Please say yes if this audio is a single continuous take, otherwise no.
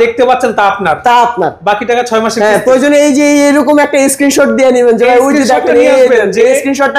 yes